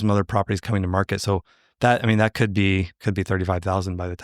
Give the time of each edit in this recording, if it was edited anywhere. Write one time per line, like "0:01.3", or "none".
0:03.0